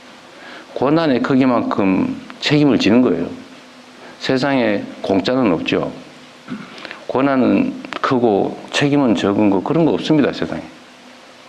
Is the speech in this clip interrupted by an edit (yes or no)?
no